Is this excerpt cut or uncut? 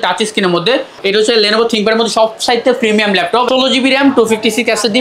cut